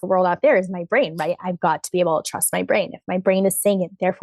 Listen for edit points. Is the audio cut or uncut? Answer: uncut